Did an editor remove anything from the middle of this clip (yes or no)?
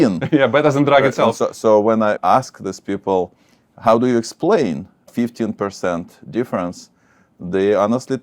yes